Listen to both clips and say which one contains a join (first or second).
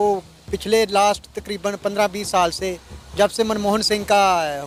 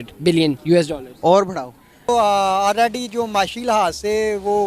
second